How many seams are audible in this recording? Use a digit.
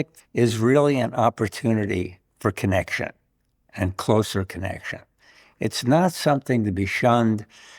0